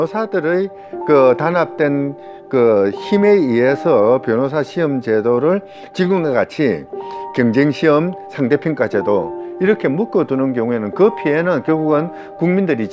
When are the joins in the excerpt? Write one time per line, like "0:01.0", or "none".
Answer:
none